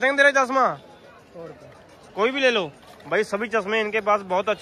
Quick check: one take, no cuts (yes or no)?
yes